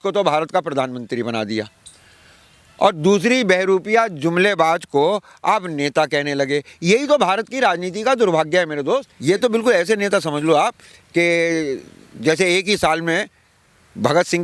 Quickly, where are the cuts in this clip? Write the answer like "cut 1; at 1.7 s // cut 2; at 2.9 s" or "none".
cut 1; at 9.1 s